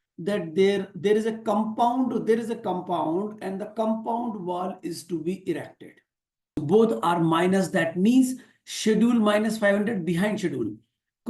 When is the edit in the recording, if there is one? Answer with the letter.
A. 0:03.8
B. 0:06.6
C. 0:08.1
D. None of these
B